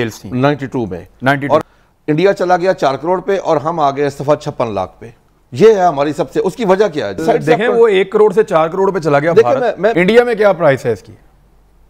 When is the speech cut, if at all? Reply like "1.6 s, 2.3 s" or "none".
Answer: 1.6 s, 7.2 s, 9.9 s

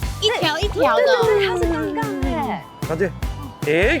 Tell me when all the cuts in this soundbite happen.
2.7 s

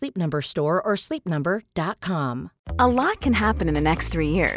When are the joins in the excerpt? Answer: 2.6 s

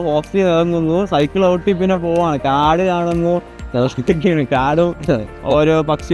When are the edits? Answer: none

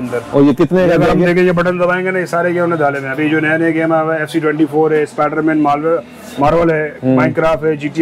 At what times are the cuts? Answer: none

